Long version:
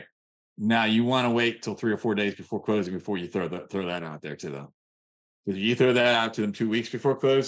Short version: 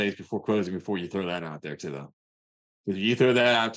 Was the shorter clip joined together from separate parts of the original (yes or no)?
yes